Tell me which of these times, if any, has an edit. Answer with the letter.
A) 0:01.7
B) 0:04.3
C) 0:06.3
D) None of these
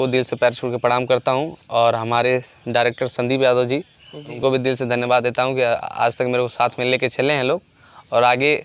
B